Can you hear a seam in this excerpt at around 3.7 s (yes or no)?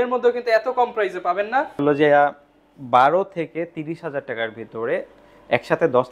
no